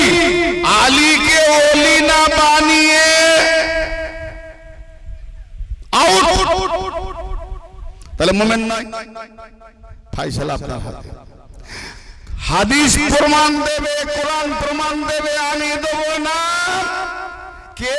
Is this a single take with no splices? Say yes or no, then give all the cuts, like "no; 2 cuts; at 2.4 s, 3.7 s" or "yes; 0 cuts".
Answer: yes; 0 cuts